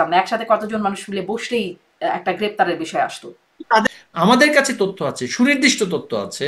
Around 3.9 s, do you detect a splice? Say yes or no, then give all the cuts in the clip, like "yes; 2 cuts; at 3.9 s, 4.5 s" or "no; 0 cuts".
yes; 1 cut; at 3.9 s